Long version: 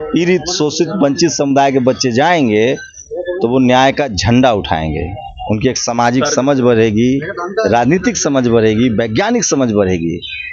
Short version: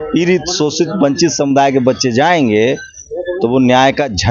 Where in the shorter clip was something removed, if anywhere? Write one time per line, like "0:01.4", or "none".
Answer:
none